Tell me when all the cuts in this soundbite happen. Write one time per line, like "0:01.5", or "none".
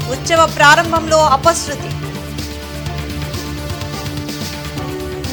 none